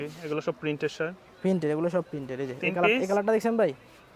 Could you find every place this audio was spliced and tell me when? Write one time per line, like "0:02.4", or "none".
none